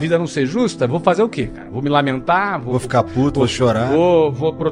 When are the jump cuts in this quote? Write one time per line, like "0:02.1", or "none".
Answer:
none